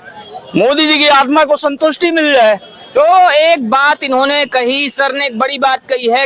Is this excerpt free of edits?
yes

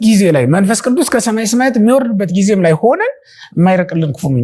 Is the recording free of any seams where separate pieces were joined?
yes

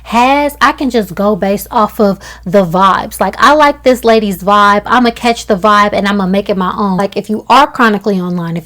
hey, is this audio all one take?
no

